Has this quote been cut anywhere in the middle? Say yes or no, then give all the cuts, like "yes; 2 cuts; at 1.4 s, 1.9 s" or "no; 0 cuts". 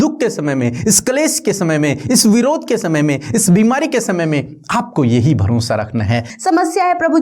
yes; 1 cut; at 6.3 s